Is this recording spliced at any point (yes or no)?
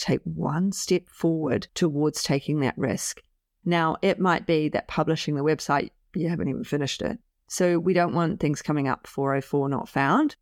no